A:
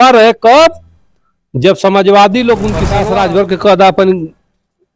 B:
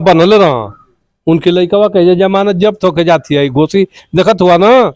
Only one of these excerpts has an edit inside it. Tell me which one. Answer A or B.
A